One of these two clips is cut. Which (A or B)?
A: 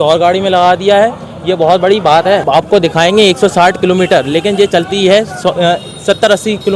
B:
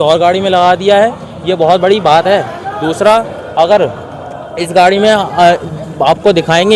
A